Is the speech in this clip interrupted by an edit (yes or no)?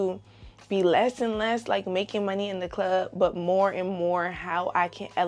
no